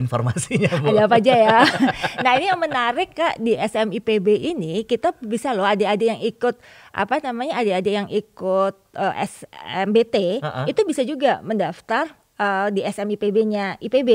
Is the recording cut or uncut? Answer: uncut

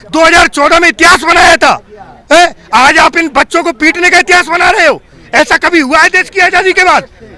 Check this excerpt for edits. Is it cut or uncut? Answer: uncut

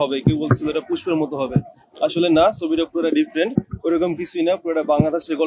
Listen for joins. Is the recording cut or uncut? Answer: uncut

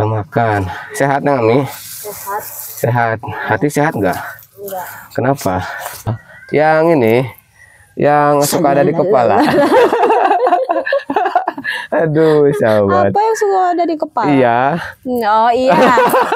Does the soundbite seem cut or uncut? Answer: cut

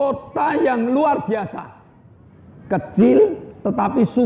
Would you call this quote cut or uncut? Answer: uncut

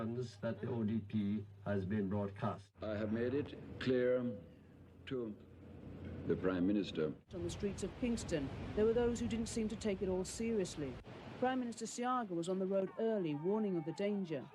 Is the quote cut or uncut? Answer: cut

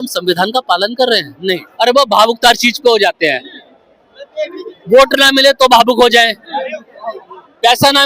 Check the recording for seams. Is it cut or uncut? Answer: cut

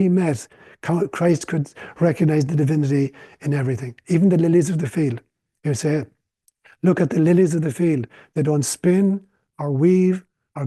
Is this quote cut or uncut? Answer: uncut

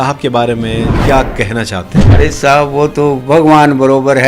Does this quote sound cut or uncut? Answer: cut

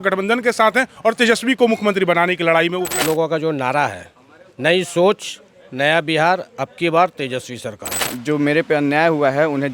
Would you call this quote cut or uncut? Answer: cut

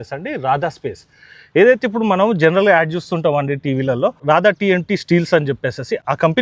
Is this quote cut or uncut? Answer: uncut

